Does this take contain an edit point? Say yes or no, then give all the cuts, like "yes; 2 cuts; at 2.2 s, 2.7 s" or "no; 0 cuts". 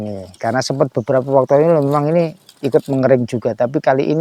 no; 0 cuts